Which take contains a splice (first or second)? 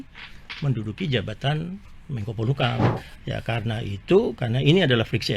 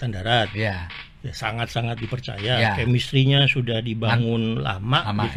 first